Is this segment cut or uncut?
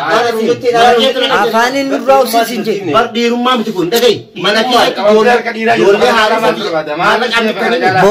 uncut